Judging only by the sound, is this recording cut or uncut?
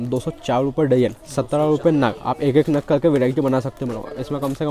uncut